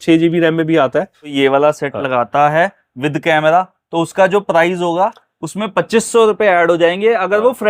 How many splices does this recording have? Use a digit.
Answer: 1